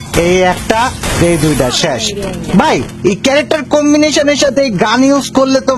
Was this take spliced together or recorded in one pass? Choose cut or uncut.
uncut